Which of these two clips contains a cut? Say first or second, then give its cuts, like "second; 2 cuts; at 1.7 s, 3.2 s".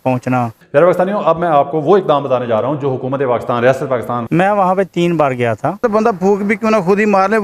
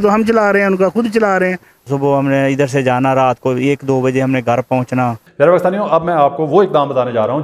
first; 2 cuts; at 4.3 s, 5.8 s